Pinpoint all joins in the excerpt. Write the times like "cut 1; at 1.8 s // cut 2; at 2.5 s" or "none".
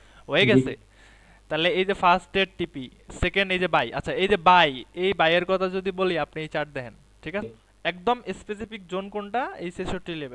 cut 1; at 7.5 s